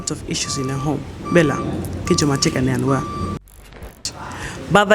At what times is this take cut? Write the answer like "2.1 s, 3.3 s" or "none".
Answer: 3.8 s